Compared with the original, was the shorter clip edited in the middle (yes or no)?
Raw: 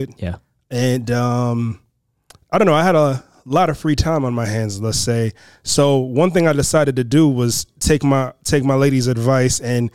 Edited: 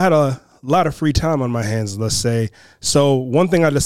no